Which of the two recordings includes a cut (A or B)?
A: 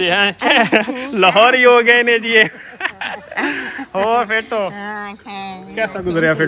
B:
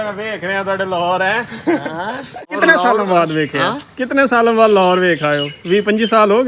B